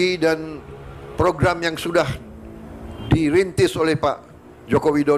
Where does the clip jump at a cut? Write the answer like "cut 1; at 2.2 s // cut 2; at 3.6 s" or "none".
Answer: none